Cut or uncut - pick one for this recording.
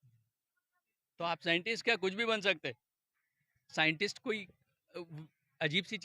uncut